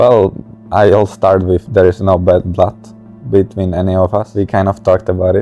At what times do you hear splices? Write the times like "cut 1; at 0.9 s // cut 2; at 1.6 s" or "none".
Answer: cut 1; at 4.2 s